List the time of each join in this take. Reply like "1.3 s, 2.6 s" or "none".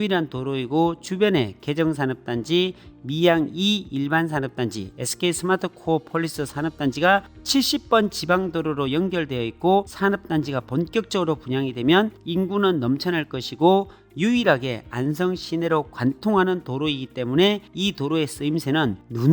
9.9 s